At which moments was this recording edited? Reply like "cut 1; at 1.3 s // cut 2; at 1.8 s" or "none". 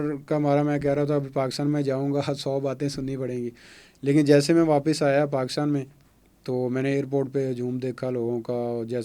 none